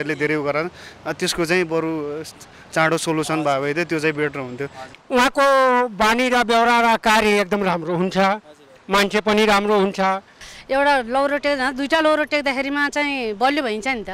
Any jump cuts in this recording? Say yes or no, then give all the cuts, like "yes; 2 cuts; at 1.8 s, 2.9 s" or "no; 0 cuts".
yes; 2 cuts; at 4.8 s, 10.5 s